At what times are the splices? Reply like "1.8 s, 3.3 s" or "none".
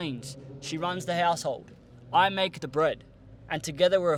none